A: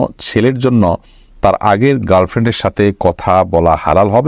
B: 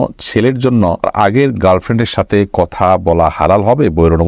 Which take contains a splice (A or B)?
B